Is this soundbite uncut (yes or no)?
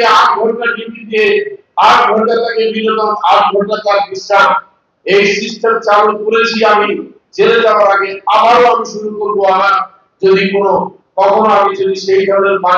yes